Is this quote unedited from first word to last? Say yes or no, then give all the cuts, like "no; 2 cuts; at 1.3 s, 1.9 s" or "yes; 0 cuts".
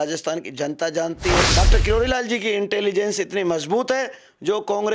no; 1 cut; at 1.4 s